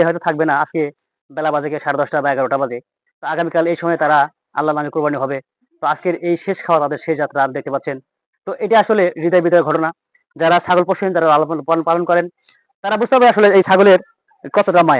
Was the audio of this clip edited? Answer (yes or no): no